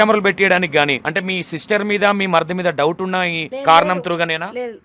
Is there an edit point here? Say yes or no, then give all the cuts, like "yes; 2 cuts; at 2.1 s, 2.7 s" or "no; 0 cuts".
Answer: yes; 2 cuts; at 1.0 s, 3.4 s